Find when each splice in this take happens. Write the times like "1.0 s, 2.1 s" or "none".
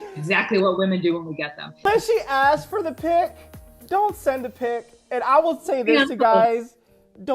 1.9 s

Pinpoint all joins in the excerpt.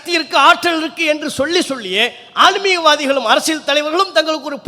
none

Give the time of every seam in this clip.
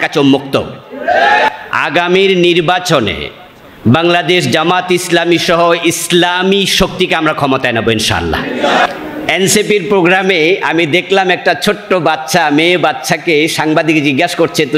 1.5 s, 8.9 s

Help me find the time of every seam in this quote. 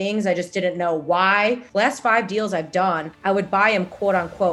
1.6 s, 3.1 s

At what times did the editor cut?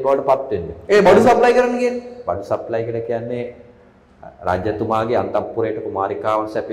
none

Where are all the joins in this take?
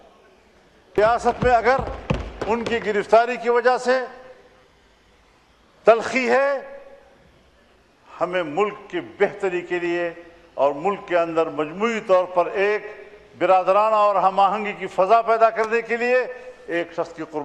1.0 s

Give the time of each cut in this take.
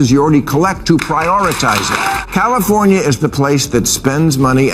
2.2 s

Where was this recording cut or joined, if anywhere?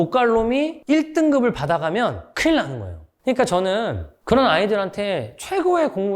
3.1 s

